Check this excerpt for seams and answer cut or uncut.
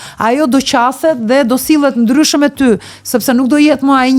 uncut